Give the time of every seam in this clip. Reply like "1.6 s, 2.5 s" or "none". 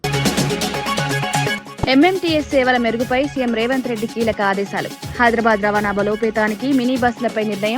1.6 s

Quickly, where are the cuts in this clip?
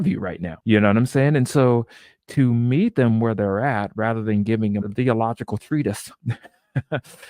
4.9 s

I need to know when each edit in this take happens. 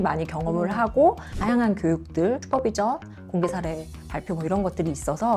1.3 s, 2.4 s

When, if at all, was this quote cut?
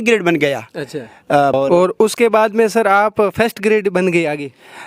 1.5 s

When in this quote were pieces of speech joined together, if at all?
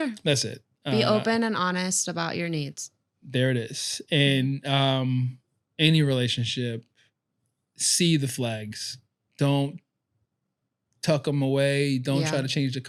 none

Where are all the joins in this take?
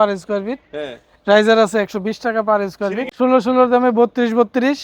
3.1 s

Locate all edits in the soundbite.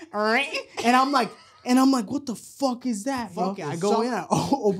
3.6 s

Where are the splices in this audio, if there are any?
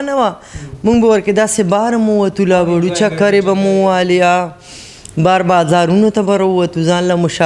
none

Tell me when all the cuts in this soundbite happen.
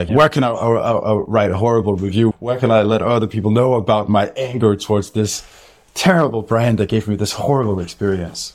2.3 s

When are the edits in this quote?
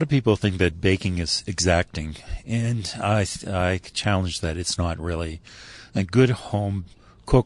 none

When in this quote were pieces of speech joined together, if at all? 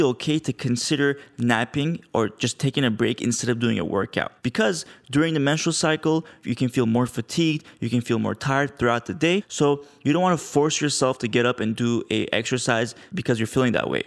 4.3 s, 9.5 s, 13.0 s

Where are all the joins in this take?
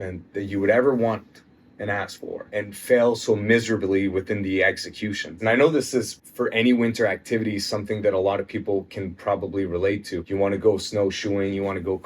2.4 s, 5.4 s, 6.2 s, 10.2 s

